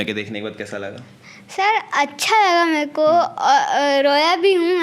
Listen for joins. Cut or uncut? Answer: uncut